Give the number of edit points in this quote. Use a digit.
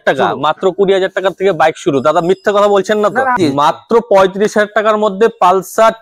1